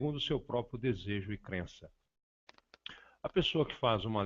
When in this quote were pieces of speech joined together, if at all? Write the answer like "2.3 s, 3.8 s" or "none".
1.8 s